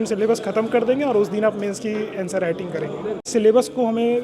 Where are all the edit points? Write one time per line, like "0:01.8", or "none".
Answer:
0:03.2